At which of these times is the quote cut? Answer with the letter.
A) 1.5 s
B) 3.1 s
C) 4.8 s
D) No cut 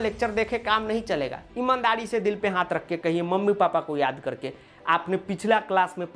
A